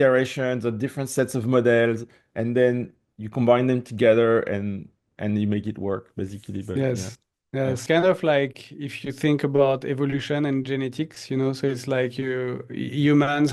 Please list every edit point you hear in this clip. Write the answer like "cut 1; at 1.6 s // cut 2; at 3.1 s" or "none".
cut 1; at 7.8 s